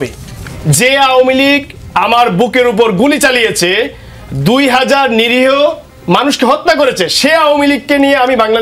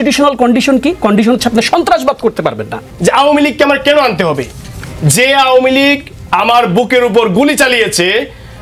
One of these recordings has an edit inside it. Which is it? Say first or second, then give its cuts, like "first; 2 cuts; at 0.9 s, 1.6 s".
second; 1 cut; at 2.8 s